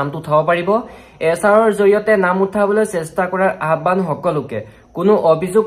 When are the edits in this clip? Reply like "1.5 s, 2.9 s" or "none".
none